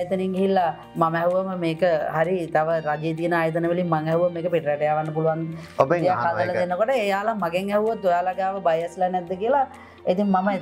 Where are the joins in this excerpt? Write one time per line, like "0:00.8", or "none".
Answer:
none